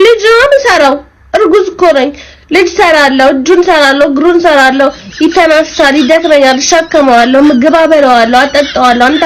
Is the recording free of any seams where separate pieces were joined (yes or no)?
yes